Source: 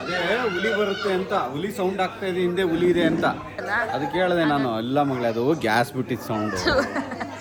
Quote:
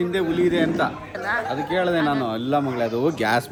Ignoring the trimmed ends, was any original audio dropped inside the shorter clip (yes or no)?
no